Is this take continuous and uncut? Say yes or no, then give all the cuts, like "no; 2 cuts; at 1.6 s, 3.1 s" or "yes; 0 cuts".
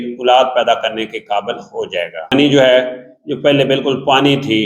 no; 1 cut; at 2.3 s